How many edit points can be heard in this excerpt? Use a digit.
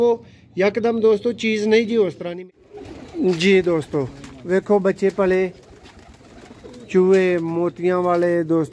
1